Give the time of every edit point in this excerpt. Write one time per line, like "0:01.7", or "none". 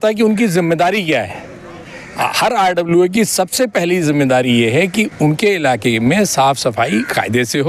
none